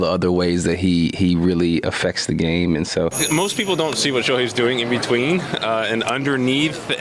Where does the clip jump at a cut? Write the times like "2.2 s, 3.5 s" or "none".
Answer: 3.2 s